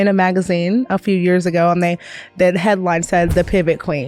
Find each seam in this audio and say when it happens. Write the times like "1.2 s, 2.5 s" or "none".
none